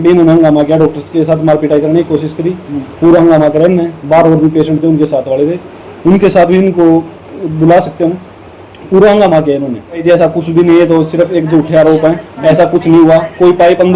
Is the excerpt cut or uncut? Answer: cut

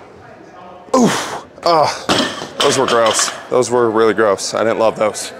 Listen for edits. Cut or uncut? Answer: uncut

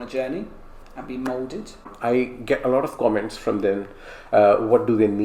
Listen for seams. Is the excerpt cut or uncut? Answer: cut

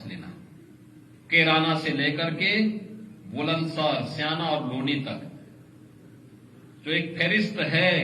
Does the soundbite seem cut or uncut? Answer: cut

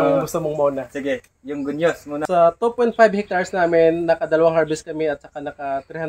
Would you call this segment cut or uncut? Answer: cut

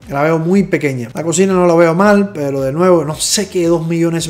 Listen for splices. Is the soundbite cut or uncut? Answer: cut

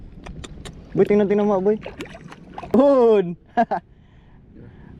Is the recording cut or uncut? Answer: cut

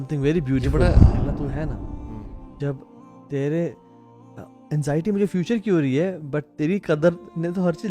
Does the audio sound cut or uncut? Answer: cut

